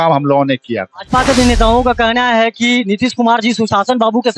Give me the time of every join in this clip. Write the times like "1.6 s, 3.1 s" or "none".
0.9 s